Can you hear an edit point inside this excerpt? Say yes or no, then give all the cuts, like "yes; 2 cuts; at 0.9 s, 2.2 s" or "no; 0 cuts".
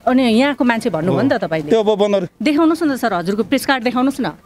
no; 0 cuts